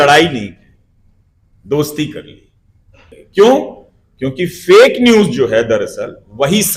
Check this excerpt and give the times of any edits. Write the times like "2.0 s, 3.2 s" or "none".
3.2 s